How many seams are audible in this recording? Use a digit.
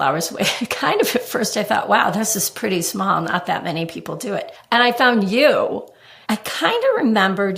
2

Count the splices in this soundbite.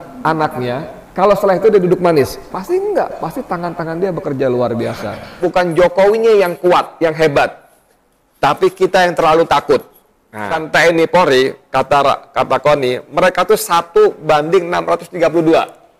3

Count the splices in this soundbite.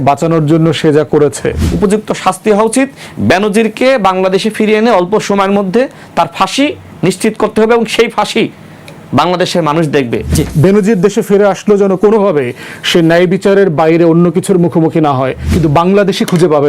3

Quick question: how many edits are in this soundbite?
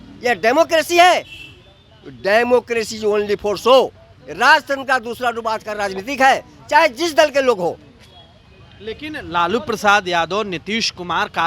0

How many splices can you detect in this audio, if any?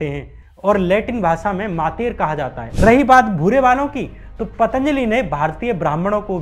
1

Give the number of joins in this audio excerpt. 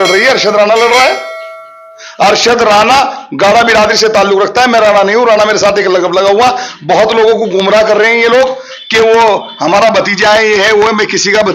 0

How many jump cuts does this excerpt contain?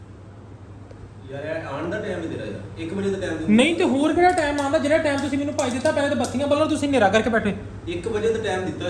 0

